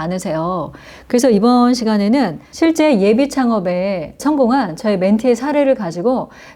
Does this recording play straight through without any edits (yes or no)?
no